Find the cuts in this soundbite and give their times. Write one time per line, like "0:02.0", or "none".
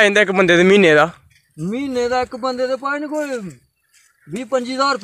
none